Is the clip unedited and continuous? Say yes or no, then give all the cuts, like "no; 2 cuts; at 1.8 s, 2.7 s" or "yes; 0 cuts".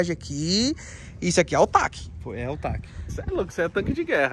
no; 1 cut; at 3.1 s